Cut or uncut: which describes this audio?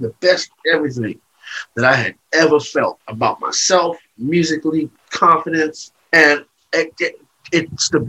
cut